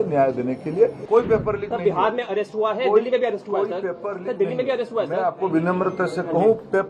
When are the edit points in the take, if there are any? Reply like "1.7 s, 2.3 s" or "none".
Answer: 1.0 s